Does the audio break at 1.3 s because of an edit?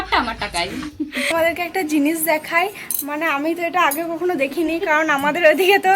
yes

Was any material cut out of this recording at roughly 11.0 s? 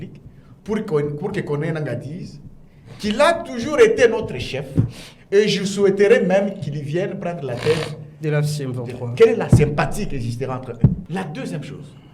yes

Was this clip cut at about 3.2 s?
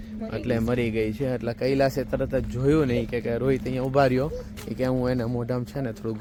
no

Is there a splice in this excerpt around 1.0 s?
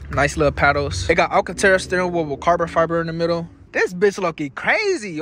yes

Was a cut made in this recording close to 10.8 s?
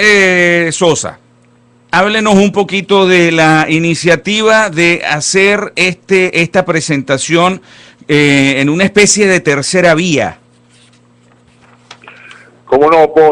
yes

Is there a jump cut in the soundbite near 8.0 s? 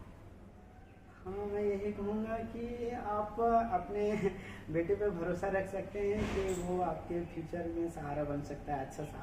no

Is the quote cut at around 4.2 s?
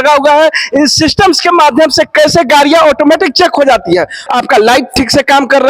yes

